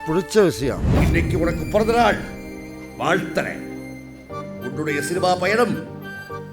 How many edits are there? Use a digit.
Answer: 1